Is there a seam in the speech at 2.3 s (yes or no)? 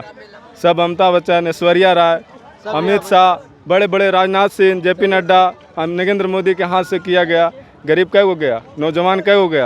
no